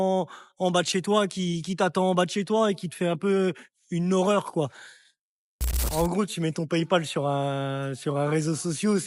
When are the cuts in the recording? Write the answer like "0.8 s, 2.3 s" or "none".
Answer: 5.8 s